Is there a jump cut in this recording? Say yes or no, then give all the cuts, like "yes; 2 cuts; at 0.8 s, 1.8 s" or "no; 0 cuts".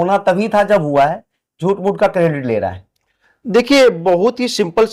no; 0 cuts